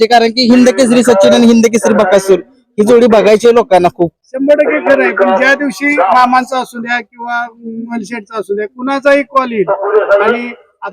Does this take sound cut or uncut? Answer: uncut